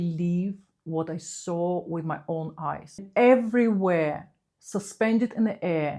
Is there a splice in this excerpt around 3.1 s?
yes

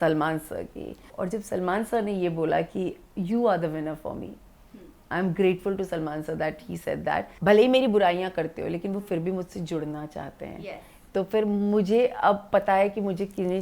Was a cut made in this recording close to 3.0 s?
no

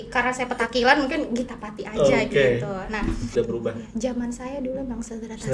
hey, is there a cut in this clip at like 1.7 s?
no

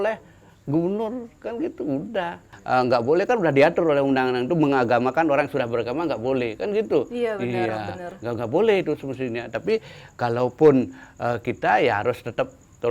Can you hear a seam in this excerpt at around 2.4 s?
yes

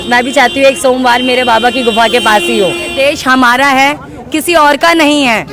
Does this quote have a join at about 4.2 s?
no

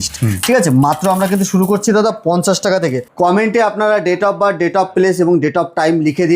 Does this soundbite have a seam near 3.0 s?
yes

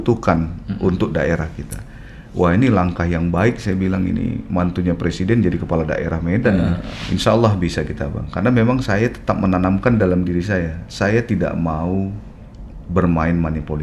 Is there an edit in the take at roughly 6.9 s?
yes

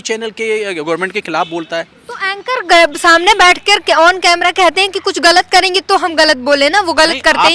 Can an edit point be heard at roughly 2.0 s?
no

